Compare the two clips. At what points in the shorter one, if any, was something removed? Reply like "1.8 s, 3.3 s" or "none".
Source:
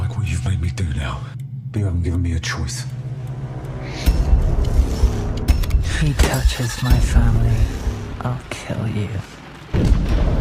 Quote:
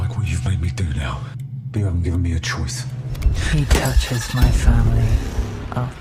3.2 s